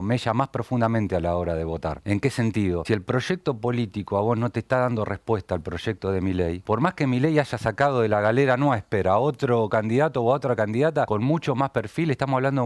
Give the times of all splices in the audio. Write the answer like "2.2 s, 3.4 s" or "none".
2.0 s, 2.8 s, 6.6 s, 11.1 s